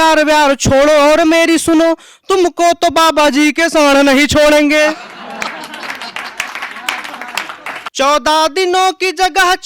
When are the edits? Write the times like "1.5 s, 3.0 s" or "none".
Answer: 7.8 s

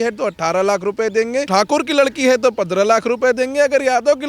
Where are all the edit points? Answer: 1.5 s

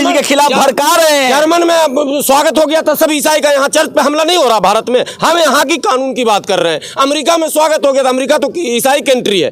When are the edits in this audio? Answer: none

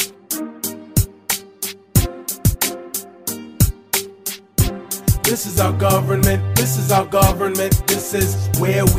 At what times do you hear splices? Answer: 4.5 s

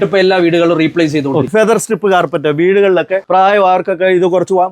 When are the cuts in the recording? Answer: 1.5 s, 3.2 s

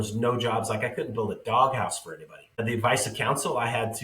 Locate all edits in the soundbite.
2.6 s

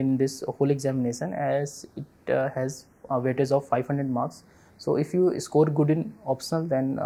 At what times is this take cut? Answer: none

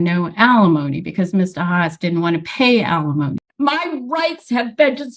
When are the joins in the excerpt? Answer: 3.4 s

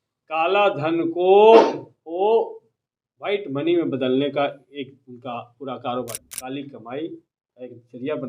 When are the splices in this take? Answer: 6.2 s

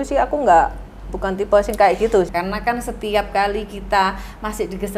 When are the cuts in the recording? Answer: 2.3 s

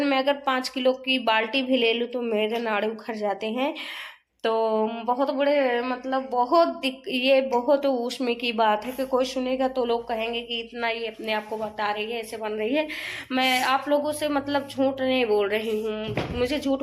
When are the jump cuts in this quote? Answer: none

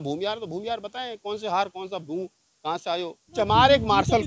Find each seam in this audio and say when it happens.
3.3 s

